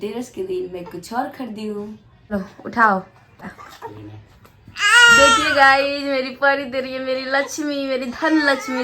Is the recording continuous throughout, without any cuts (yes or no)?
no